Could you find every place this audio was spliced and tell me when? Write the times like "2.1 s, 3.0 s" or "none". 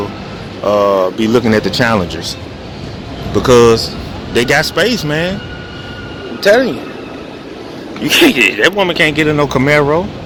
none